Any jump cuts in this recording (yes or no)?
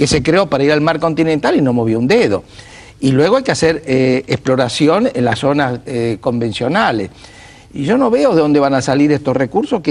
yes